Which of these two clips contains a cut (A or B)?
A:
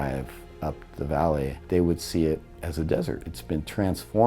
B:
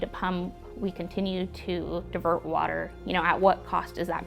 A